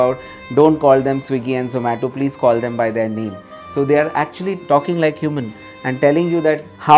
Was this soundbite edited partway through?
no; 0 cuts

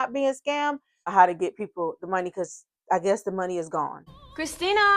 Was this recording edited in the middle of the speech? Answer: yes; 2 cuts; at 1.1 s, 4.1 s

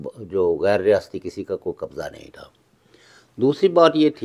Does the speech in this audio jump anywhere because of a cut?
no; 0 cuts

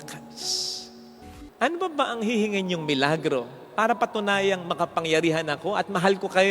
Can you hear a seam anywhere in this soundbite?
yes; 1 cut; at 1.3 s

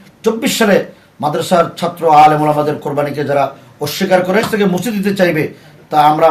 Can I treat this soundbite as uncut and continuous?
no; 1 cut; at 4.4 s

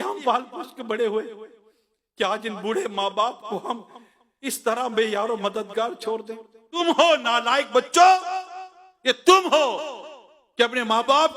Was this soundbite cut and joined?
yes; 1 cut; at 6.8 s

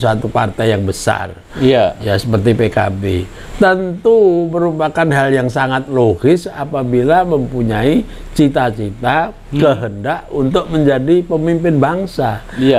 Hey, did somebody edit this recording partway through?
no; 0 cuts

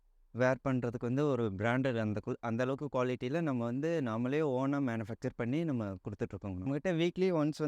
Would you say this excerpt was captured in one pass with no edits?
no; 1 cut; at 6.7 s

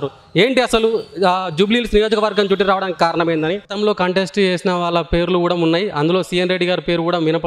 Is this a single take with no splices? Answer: no; 1 cut; at 3.7 s

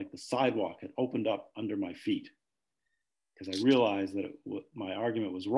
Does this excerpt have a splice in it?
no; 0 cuts

